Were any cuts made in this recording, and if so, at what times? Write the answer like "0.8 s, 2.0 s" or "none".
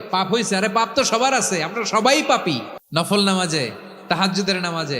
2.7 s